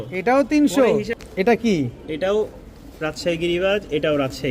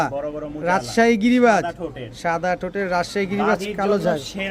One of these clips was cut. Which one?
first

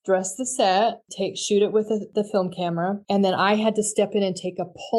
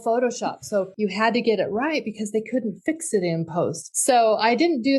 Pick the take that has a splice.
second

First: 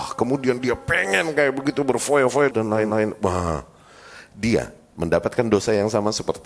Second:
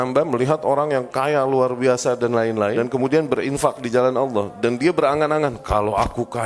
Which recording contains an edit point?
second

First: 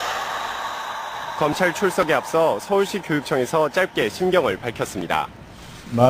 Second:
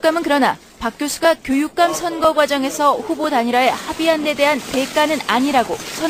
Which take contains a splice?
first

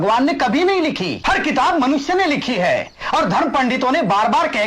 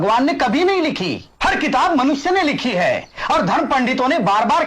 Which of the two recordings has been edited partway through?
first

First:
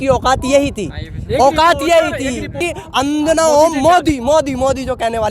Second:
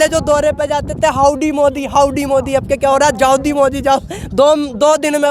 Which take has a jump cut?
first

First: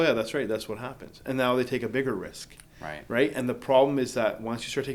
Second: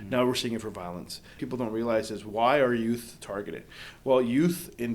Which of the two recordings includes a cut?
second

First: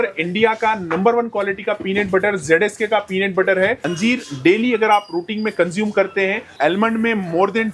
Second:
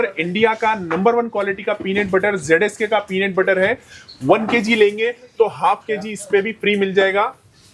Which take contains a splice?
first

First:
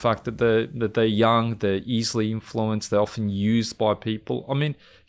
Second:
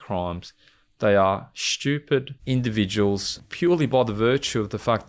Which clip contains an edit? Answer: second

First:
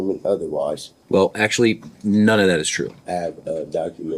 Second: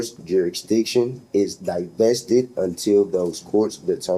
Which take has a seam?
first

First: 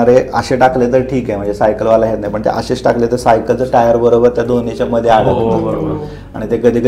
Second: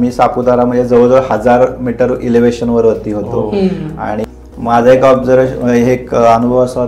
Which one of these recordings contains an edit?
second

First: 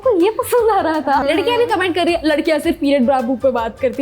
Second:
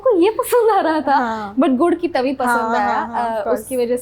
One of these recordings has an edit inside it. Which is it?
first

